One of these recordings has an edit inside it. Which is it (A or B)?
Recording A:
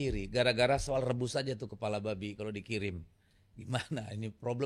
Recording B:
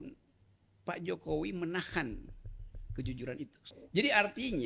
B